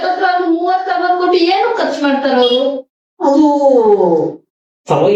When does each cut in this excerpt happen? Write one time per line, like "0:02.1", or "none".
none